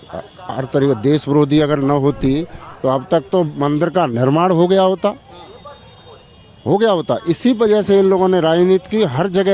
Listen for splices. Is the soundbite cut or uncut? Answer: uncut